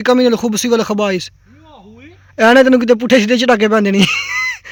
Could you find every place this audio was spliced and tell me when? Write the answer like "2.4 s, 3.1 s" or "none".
none